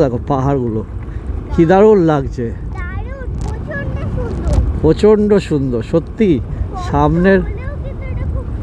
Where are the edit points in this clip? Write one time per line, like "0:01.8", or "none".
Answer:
none